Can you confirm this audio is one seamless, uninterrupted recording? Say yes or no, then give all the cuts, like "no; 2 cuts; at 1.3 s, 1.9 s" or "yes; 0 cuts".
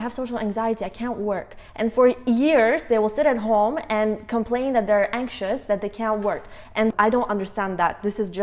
no; 1 cut; at 6.9 s